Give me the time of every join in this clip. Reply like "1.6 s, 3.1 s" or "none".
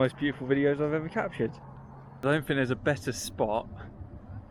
2.0 s